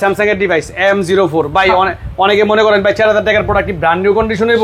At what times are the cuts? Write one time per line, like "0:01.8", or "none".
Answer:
none